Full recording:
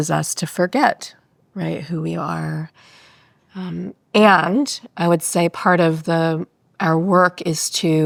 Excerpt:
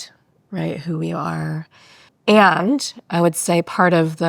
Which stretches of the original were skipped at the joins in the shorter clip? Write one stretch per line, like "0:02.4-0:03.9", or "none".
0:03.2-0:04.0